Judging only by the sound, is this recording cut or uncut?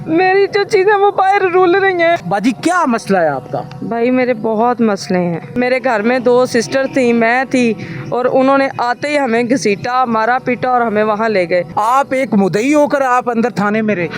cut